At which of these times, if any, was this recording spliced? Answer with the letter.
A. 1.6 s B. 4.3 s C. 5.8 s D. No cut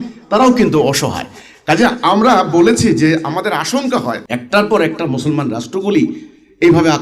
B